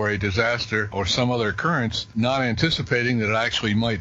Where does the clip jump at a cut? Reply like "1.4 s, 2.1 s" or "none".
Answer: none